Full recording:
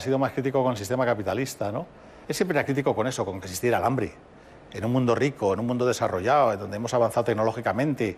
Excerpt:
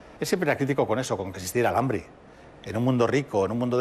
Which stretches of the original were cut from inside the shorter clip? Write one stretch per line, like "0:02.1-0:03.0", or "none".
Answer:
none